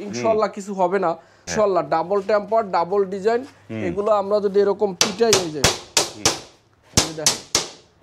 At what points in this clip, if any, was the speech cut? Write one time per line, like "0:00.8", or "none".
0:01.4